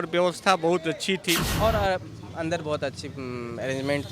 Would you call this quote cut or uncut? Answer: cut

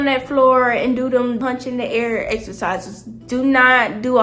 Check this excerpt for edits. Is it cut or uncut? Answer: cut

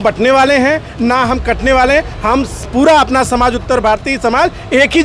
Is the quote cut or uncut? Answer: uncut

